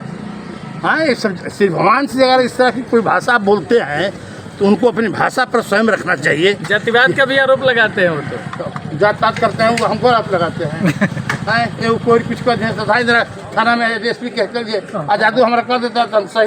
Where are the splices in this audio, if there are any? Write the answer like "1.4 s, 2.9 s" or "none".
none

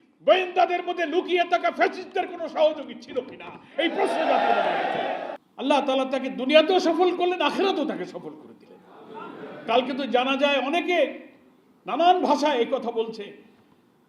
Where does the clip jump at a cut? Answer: 5.4 s

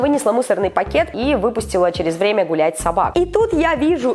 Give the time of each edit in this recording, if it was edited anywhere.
1.1 s, 3.1 s

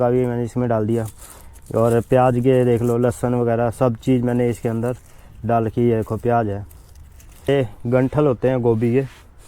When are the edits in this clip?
7.5 s

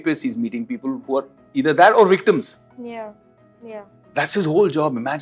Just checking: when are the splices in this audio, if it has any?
none

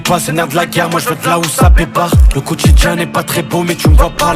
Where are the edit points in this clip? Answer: none

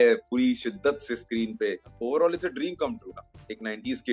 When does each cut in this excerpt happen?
1.9 s

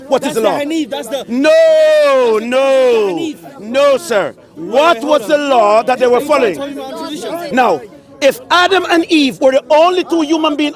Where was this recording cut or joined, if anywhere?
7.4 s

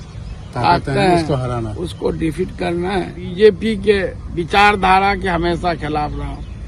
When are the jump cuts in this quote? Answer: 3.2 s

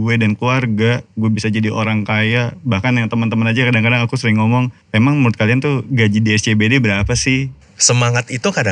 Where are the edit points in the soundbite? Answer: 1.1 s, 4.8 s, 7.6 s

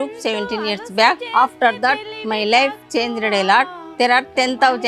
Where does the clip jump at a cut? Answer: 1.2 s

